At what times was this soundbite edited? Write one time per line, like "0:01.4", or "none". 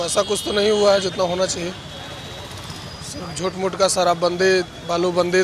none